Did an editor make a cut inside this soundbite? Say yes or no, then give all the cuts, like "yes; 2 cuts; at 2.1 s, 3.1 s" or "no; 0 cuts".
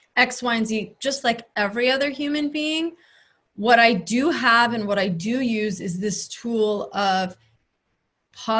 no; 0 cuts